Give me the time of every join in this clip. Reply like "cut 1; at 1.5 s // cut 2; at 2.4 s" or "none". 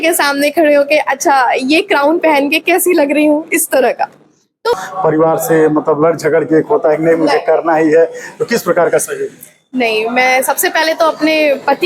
cut 1; at 4.8 s